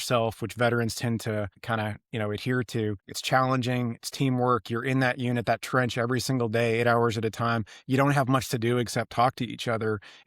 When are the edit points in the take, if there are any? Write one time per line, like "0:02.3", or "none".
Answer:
0:01.6
0:03.1

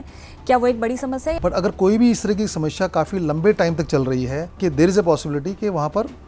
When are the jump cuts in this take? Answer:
0:01.4
0:04.4

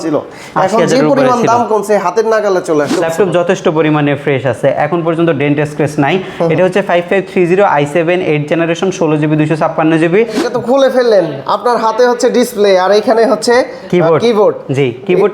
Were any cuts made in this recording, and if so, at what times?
0:02.9
0:10.5

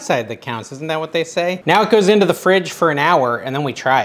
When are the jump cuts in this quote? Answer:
none

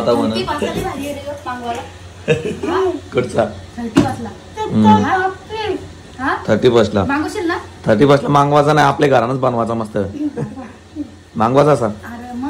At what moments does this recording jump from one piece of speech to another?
none

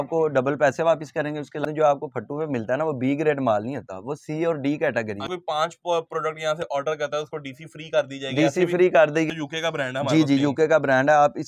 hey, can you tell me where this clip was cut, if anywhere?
0:01.6
0:05.3
0:09.3

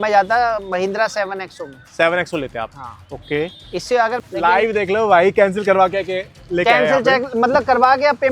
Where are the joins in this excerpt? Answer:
0:04.2

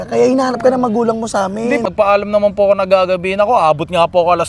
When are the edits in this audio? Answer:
0:01.8

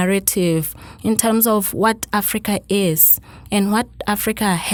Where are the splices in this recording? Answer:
none

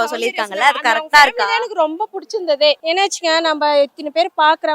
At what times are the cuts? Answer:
0:02.8

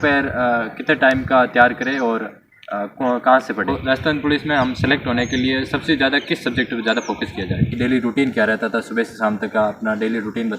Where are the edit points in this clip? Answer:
0:03.8
0:07.7

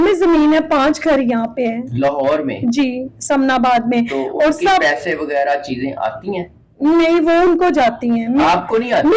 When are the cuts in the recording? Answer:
none

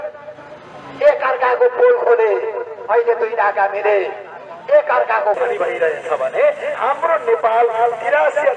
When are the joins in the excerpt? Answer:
0:05.4

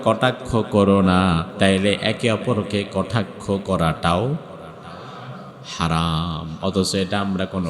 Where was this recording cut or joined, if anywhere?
0:01.5

